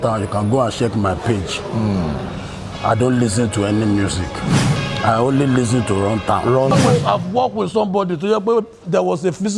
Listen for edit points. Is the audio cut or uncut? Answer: cut